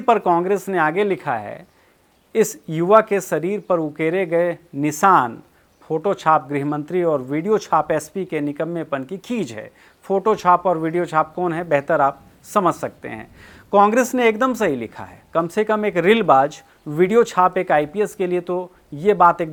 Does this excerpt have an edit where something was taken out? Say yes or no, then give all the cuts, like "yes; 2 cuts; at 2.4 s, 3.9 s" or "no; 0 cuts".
no; 0 cuts